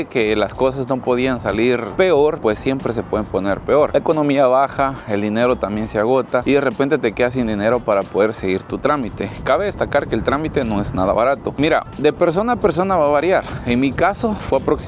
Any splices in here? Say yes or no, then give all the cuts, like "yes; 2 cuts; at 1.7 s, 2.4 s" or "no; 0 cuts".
no; 0 cuts